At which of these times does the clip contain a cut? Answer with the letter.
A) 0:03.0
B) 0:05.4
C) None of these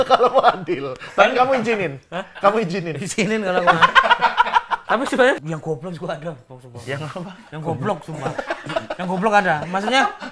B